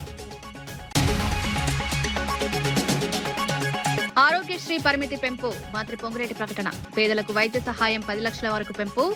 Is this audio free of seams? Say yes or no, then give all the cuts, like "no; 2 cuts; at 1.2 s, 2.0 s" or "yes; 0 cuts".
no; 2 cuts; at 0.9 s, 4.1 s